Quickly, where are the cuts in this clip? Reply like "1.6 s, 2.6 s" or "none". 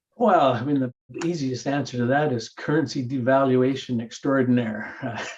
none